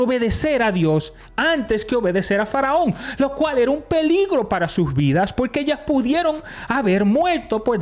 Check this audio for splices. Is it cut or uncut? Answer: uncut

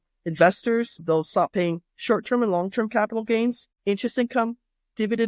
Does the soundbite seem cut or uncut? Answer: cut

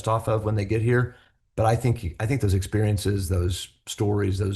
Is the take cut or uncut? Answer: uncut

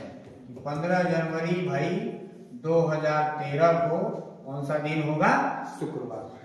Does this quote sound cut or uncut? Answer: uncut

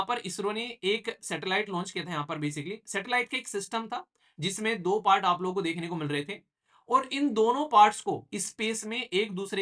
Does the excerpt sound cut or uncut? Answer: uncut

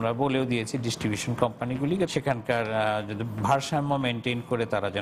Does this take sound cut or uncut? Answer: uncut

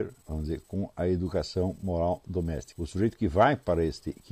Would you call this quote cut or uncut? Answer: cut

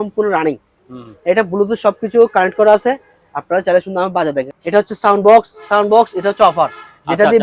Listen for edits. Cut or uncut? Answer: cut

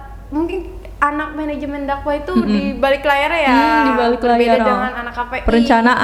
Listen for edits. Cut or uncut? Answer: uncut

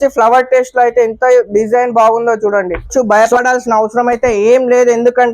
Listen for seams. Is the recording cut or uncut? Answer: cut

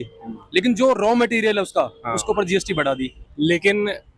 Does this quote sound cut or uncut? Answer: cut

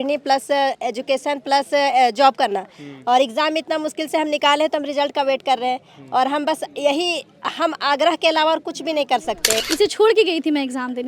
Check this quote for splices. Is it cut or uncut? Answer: cut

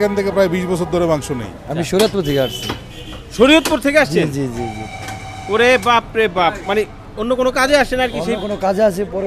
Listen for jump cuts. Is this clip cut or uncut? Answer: cut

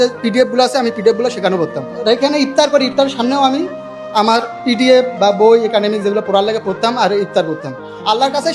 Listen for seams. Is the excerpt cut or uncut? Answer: cut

